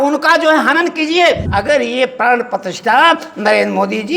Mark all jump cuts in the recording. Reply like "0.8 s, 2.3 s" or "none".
1.5 s